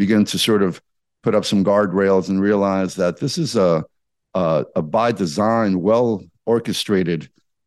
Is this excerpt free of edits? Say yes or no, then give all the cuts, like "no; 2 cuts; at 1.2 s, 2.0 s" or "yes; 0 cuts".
yes; 0 cuts